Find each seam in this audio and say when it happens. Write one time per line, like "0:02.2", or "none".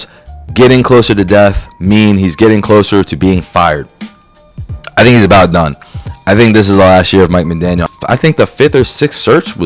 0:07.9